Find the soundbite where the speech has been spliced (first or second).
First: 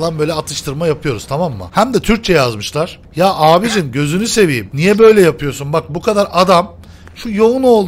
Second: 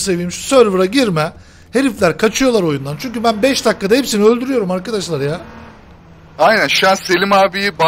first